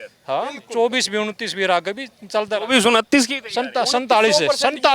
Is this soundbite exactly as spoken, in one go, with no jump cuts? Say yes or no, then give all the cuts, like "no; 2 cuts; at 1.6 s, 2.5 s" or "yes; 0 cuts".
yes; 0 cuts